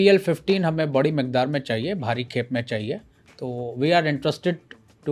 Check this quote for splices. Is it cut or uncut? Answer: uncut